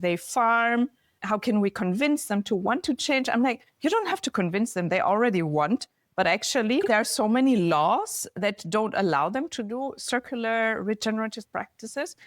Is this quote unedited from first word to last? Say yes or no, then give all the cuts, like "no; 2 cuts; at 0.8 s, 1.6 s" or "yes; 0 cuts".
no; 3 cuts; at 1.2 s, 6.9 s, 8.3 s